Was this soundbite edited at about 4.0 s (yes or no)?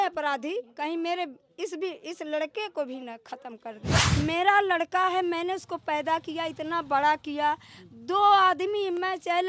yes